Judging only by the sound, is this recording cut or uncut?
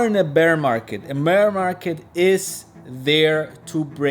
uncut